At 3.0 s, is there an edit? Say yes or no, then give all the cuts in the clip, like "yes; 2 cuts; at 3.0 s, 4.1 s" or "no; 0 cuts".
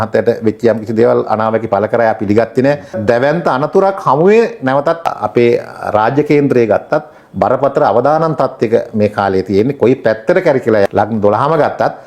yes; 3 cuts; at 3.0 s, 5.1 s, 10.9 s